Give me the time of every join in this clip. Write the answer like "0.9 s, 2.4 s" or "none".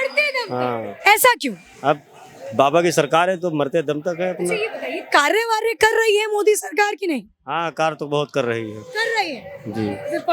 none